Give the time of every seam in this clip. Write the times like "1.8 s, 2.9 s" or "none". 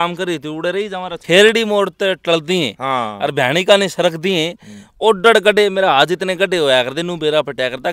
1.1 s